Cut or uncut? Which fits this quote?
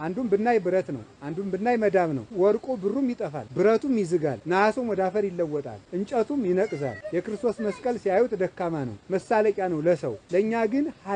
cut